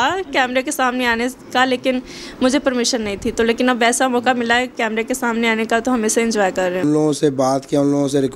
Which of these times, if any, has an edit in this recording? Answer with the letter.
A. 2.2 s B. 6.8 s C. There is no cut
B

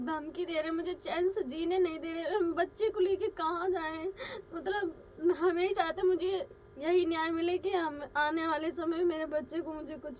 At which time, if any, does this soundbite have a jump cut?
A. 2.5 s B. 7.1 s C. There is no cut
C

